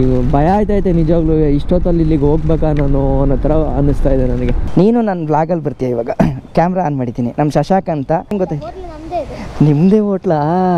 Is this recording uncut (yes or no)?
no